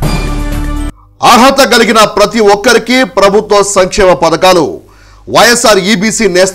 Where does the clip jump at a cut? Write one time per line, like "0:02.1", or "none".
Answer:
0:01.0